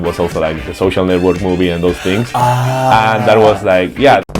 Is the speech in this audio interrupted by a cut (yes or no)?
no